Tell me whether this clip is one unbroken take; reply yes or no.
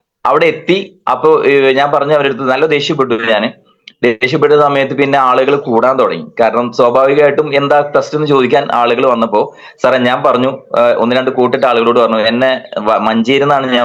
yes